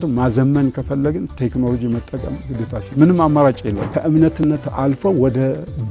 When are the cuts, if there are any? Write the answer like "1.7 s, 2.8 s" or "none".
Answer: 3.9 s